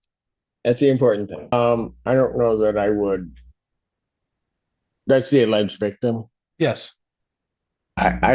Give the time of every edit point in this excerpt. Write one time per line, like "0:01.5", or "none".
0:01.5